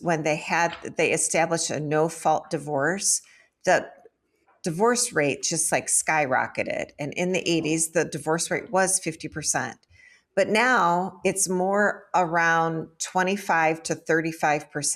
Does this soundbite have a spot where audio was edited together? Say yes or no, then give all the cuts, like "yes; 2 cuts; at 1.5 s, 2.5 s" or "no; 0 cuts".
no; 0 cuts